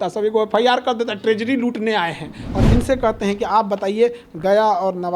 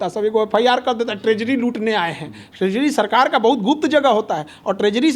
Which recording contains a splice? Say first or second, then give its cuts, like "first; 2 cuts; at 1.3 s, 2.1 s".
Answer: first; 1 cut; at 2.4 s